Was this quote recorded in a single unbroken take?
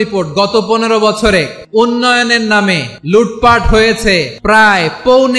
no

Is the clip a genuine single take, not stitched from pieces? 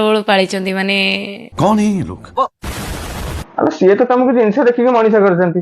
yes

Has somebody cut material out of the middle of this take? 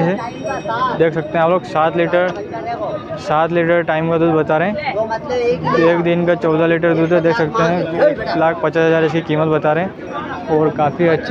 no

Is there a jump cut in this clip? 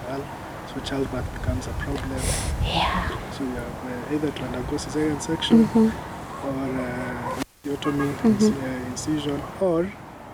no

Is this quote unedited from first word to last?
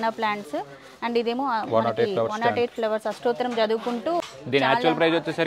no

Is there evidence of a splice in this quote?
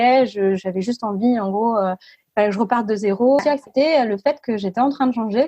yes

